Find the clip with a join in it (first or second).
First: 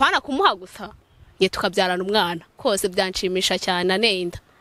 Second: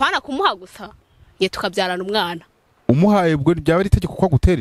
first